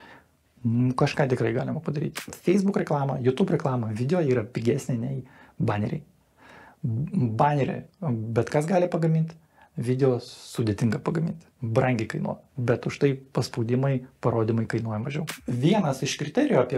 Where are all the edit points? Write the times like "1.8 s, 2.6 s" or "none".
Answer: 2.3 s, 15.3 s

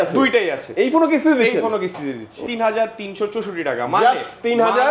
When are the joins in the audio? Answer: 2.4 s

